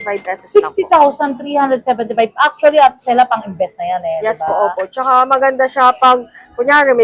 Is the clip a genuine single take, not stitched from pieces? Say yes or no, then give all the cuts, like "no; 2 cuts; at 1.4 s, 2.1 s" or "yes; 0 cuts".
yes; 0 cuts